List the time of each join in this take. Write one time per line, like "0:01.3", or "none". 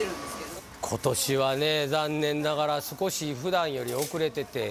none